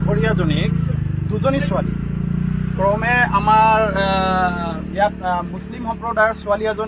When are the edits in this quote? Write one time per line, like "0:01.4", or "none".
none